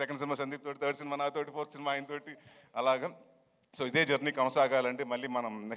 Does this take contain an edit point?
no; 0 cuts

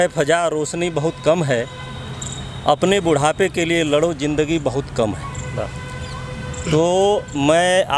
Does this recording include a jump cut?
no; 0 cuts

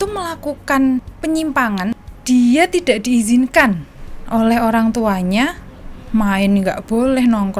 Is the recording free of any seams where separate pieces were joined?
no; 2 cuts; at 1.1 s, 1.9 s

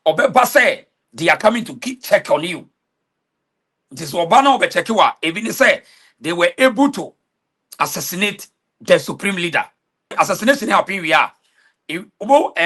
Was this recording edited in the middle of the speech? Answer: yes; 1 cut; at 10.1 s

